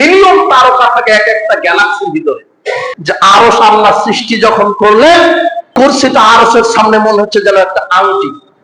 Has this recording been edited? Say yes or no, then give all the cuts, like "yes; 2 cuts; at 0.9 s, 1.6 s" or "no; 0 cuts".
yes; 2 cuts; at 2.9 s, 5.7 s